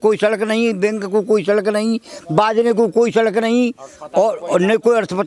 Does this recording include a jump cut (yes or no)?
no